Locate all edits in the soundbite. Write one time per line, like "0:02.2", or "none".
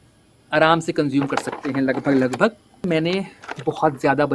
0:02.8